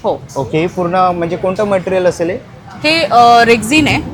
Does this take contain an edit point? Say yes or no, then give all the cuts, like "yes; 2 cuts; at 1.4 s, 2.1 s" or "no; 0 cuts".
no; 0 cuts